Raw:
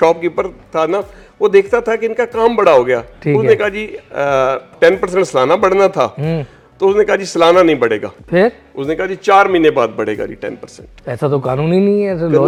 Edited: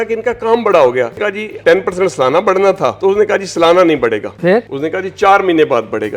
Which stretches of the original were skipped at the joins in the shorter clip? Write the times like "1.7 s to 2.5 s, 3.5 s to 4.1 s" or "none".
3.3 s to 4.5 s, 6.1 s to 6.7 s, 8.3 s to 8.5 s